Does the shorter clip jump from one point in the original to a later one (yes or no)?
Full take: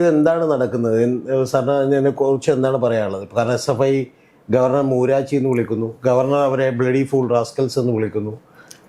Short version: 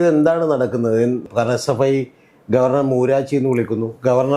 yes